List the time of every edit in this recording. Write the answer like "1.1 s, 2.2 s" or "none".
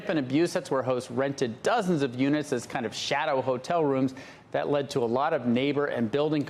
1.1 s